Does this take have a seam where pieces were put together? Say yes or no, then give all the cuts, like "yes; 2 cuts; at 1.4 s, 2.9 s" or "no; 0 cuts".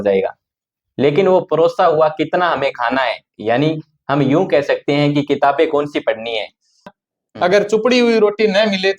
yes; 1 cut; at 7.0 s